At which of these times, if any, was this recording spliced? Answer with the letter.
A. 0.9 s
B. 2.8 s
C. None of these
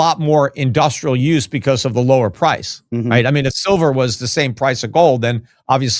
C